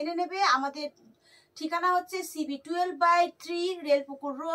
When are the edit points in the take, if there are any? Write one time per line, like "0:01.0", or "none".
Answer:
none